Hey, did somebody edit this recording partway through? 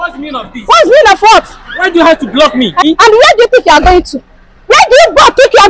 yes; 1 cut; at 2.8 s

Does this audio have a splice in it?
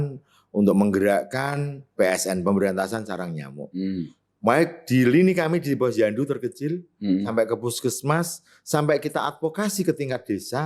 no; 0 cuts

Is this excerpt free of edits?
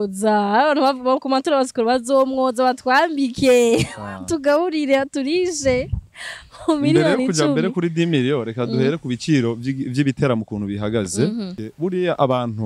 no; 1 cut; at 11.6 s

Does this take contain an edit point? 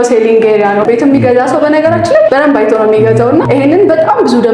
yes; 3 cuts; at 0.8 s, 2.3 s, 3.4 s

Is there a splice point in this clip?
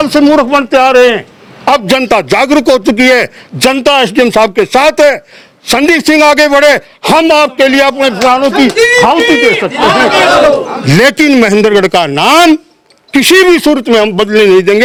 no; 0 cuts

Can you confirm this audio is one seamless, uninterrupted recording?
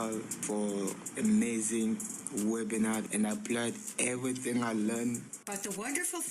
no; 2 cuts; at 4.4 s, 5.3 s

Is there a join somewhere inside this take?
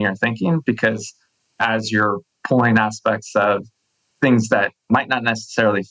no; 0 cuts

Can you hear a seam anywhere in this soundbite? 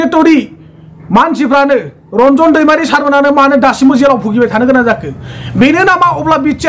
no; 0 cuts

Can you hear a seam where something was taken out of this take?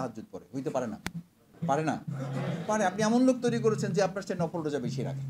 yes; 1 cut; at 1.4 s

